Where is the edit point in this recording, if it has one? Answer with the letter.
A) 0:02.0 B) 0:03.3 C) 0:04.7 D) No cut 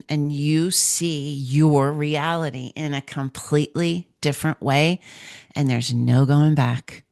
D